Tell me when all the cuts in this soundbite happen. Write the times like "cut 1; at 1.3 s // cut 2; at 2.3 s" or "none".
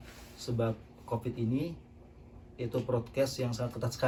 none